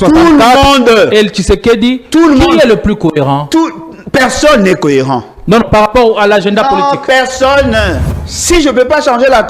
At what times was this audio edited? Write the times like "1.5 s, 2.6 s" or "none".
8.1 s